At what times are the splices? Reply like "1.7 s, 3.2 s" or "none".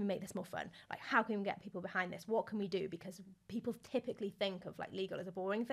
none